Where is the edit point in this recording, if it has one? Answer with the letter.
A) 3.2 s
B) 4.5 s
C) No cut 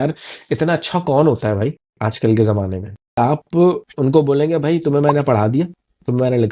A